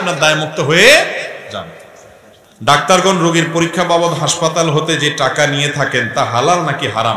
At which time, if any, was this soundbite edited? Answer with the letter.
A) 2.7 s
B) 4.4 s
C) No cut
A